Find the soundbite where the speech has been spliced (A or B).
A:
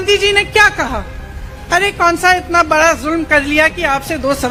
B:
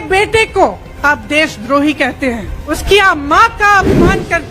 B